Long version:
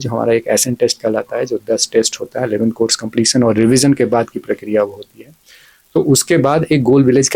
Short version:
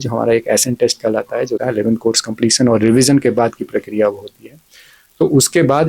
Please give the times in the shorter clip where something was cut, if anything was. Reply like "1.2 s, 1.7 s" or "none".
1.6 s